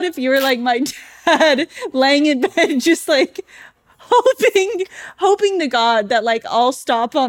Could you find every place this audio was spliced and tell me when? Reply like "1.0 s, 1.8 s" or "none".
none